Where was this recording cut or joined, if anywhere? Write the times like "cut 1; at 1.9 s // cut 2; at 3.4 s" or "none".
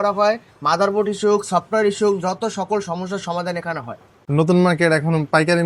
cut 1; at 4.1 s